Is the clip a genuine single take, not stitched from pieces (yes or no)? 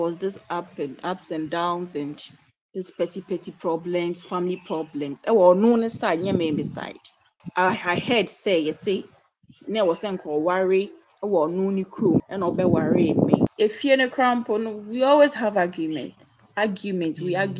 no